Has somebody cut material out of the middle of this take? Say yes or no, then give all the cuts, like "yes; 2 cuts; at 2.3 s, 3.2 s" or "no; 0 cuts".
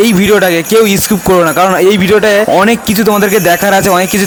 no; 0 cuts